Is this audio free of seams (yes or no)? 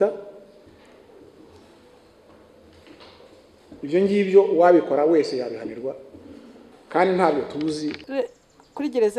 no